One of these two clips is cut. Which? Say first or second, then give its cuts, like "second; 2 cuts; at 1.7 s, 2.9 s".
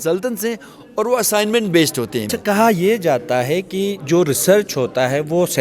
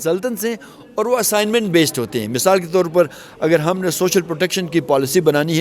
first; 1 cut; at 2.3 s